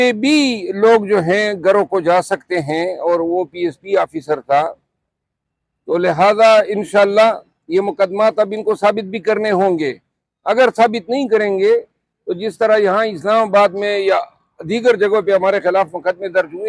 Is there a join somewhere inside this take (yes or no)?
no